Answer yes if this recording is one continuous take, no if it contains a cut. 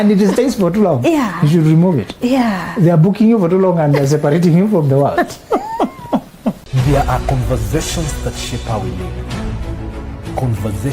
no